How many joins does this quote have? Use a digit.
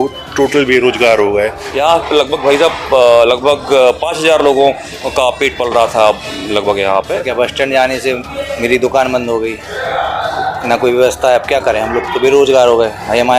2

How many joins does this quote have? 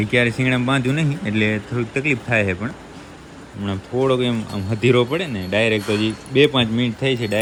0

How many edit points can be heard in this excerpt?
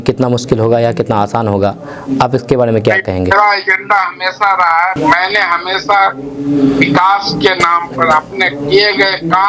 1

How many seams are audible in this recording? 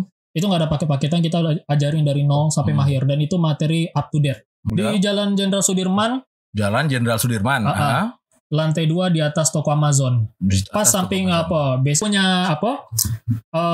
2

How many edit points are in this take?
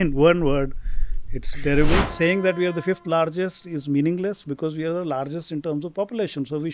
1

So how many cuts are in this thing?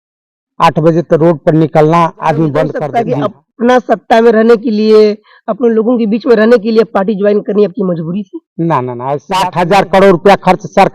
2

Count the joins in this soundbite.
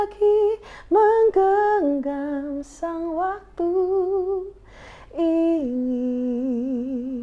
0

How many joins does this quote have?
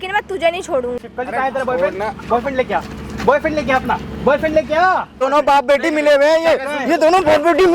2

